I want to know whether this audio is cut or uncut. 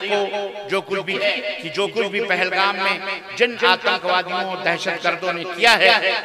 cut